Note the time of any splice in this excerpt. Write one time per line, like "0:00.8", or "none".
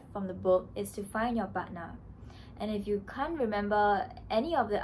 none